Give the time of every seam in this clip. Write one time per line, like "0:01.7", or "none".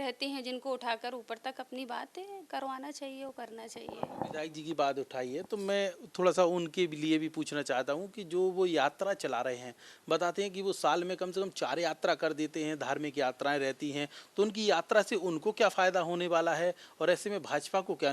none

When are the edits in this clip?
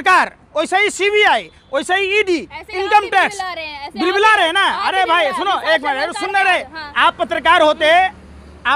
none

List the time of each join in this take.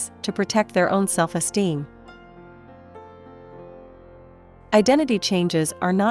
0:01.9
0:04.4

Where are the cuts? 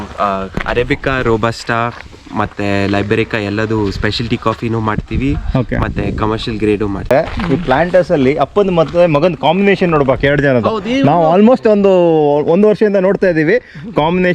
0:07.1

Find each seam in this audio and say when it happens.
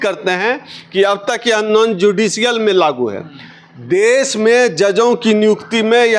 none

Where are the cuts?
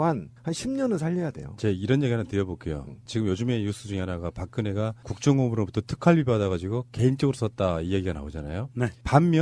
none

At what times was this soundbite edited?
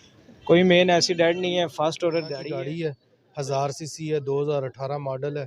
0:02.4

